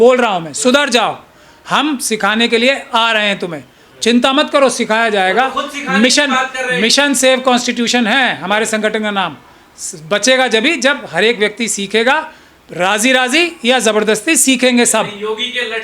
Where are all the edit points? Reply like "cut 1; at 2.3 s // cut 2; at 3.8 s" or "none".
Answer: none